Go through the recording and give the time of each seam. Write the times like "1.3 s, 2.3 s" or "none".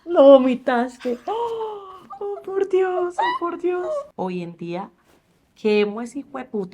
4.1 s